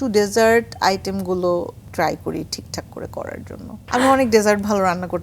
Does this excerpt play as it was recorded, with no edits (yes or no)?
no